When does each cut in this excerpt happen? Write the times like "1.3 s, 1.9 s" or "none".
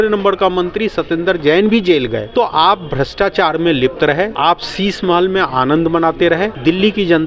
none